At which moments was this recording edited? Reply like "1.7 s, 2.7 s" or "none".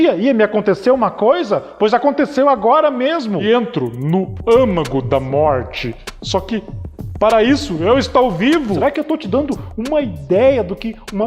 3.4 s, 8.8 s